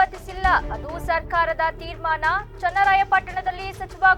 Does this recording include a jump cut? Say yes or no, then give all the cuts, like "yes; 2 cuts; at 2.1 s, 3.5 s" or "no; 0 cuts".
no; 0 cuts